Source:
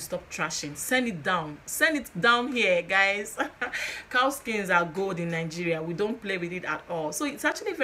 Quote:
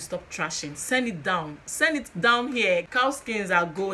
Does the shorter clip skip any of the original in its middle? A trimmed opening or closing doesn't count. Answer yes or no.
yes